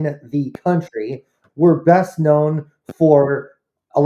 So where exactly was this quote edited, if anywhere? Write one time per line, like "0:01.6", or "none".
0:01.4